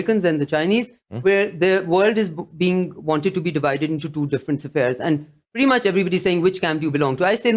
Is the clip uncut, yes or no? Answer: yes